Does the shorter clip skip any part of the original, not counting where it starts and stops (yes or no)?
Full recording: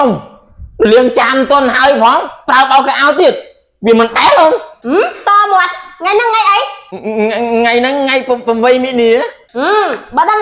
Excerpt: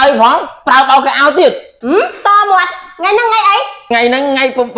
yes